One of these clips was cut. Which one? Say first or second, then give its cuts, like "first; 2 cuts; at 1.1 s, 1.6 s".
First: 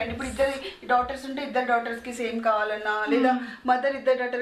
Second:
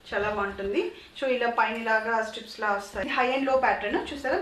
second; 1 cut; at 3.0 s